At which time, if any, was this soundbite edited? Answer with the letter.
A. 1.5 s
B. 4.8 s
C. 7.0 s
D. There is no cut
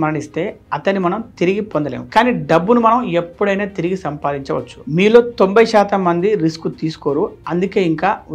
B